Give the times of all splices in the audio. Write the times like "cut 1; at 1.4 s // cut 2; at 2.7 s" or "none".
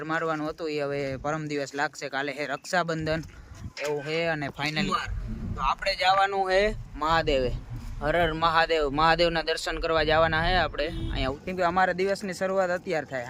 cut 1; at 4.8 s // cut 2; at 11.4 s